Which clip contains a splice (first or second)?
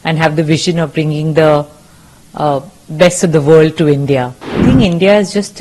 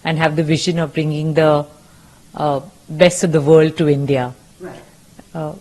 first